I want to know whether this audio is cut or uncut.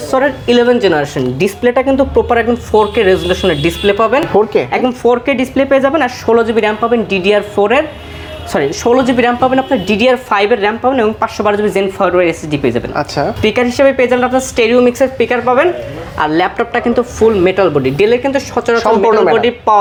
uncut